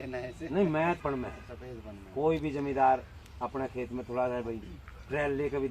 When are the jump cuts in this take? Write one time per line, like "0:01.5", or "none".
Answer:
0:01.0